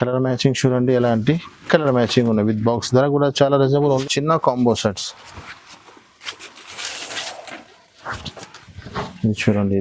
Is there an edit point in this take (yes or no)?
yes